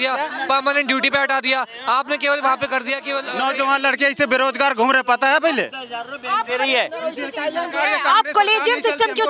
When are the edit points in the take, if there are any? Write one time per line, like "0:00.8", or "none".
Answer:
0:03.2